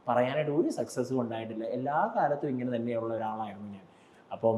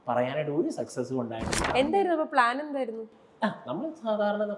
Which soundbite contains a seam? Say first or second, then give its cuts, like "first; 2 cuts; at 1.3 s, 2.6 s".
second; 1 cut; at 1.6 s